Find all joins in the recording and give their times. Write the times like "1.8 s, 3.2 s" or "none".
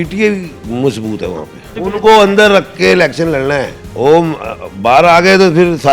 1.7 s, 3.8 s